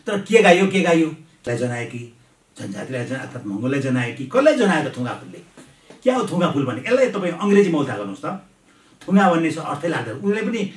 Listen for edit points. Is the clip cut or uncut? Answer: cut